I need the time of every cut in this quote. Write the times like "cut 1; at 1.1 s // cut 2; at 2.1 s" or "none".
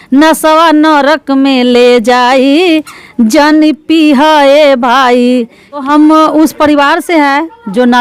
cut 1; at 5.8 s